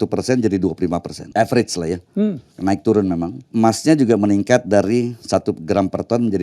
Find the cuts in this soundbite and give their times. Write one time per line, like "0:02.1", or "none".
0:01.2
0:02.5
0:03.4
0:05.2